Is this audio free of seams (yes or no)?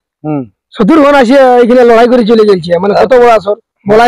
yes